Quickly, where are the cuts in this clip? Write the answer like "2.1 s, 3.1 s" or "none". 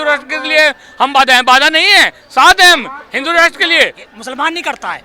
4.1 s